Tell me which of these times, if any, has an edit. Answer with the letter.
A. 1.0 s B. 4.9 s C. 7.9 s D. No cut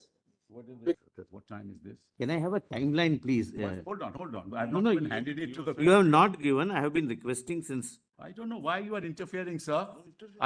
A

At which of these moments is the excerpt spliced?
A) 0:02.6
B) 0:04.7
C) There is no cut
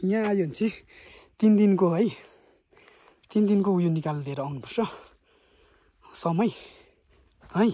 C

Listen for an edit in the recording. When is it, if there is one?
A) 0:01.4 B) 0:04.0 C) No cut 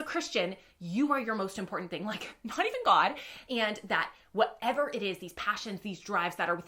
C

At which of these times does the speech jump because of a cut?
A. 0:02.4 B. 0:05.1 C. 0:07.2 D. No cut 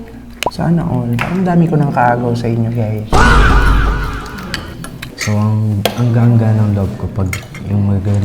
B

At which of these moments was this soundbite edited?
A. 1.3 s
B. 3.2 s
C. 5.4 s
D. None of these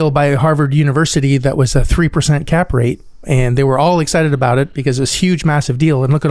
B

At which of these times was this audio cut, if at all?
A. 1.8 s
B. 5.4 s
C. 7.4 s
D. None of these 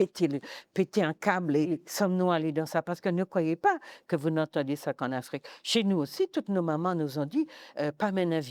A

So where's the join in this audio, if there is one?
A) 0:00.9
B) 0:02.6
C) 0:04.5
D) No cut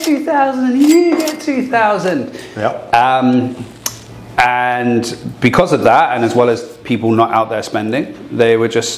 D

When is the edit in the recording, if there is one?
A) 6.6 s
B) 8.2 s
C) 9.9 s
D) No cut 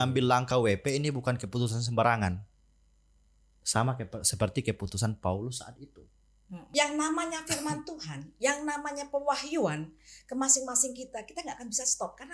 A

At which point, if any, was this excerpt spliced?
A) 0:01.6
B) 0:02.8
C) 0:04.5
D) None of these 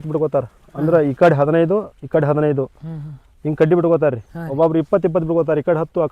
D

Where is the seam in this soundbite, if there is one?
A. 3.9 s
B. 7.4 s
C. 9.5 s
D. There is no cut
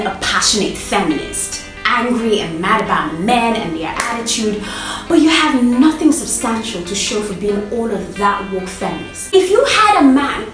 C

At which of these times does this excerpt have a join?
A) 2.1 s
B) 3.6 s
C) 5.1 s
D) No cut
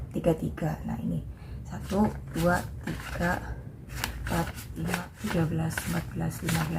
C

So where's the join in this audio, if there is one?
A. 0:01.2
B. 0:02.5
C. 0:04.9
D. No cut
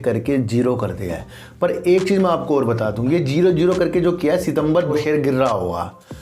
C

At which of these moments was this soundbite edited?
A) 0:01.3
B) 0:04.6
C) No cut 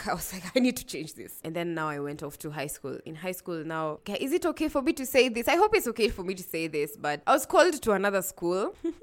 A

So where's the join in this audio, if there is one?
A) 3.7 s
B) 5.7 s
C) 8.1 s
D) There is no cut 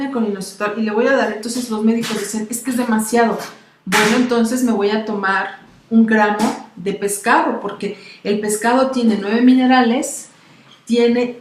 B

